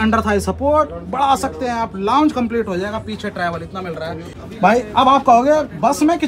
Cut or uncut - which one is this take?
cut